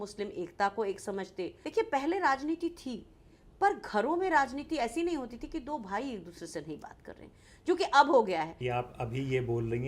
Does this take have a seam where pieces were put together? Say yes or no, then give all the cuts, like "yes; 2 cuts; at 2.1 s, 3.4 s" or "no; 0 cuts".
yes; 2 cuts; at 1.6 s, 8.6 s